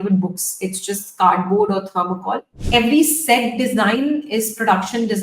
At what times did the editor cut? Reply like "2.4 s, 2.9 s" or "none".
2.5 s